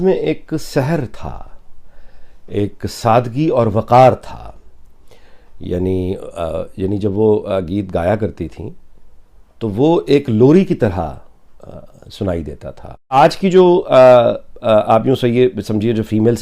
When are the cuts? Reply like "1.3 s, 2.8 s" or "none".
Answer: 13.2 s